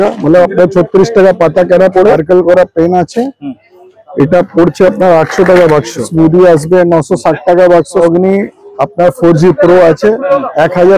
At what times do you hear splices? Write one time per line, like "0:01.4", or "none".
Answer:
0:02.2
0:06.1
0:08.0